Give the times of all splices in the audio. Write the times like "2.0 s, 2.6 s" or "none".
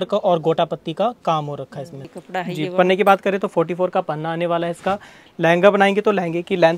2.1 s